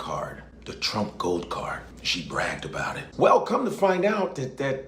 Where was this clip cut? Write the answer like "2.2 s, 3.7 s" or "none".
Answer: 3.0 s